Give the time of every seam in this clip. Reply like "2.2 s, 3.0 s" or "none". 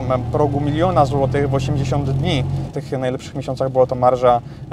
2.8 s